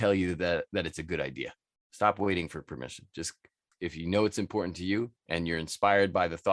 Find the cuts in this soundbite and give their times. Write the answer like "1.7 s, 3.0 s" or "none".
3.8 s